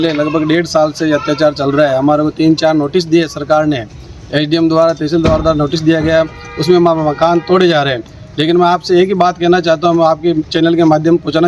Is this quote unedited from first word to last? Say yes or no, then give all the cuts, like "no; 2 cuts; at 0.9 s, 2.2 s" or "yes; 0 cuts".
yes; 0 cuts